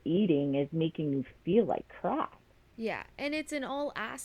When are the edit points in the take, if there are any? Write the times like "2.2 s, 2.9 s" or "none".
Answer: none

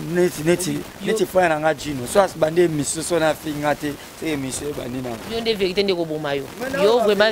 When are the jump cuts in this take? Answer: none

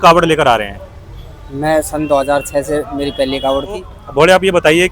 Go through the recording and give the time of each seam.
4.0 s

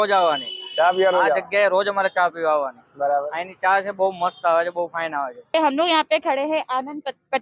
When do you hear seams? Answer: 5.5 s

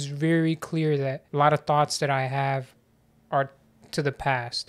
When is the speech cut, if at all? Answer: 1.2 s

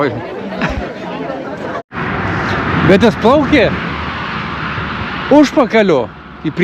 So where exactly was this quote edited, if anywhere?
1.8 s

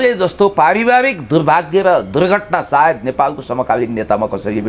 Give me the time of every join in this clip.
none

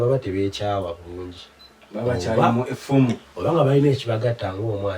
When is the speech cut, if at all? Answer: none

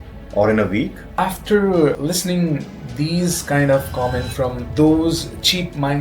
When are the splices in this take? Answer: 1.0 s, 2.0 s, 4.6 s

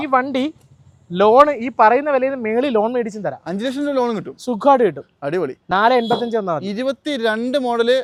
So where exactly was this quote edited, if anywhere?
none

